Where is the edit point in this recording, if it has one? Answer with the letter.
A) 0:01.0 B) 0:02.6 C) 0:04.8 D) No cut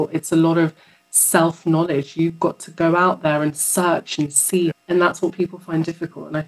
C